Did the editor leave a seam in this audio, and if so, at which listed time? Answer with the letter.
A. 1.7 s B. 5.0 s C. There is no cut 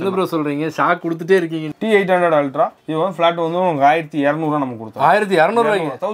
A